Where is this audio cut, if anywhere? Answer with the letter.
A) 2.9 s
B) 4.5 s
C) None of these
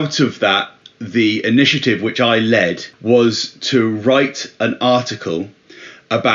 A